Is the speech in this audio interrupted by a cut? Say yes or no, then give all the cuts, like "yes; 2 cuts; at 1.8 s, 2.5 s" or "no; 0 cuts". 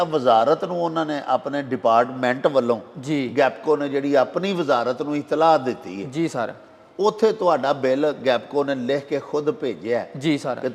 no; 0 cuts